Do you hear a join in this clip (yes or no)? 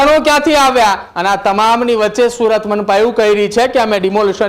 yes